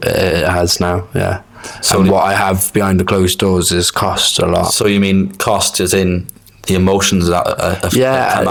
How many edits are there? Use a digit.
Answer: 0